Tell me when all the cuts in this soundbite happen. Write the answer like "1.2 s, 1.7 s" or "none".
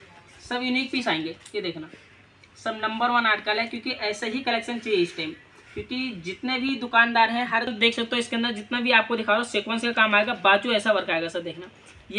7.7 s